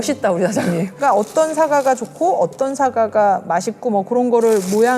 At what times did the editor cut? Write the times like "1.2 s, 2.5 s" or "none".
0.9 s